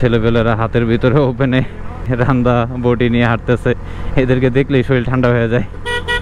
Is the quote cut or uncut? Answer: uncut